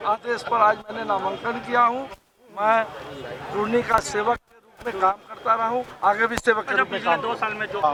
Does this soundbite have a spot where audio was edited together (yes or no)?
no